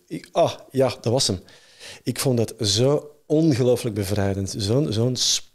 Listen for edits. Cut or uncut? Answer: uncut